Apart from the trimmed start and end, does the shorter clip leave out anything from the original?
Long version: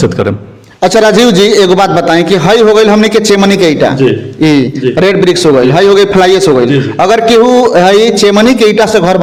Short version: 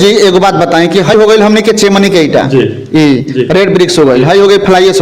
yes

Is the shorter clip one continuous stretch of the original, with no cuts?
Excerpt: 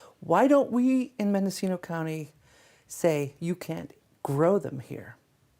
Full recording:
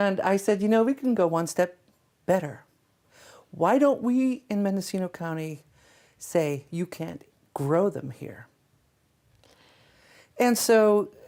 yes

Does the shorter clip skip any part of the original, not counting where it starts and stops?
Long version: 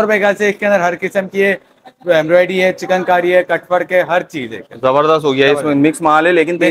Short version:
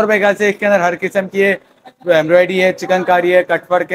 no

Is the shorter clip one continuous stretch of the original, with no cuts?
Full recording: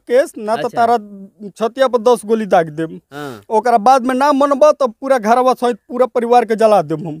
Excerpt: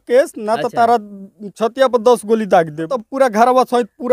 no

